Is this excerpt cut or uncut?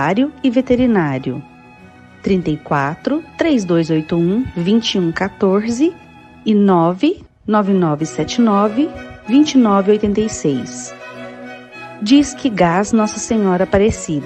uncut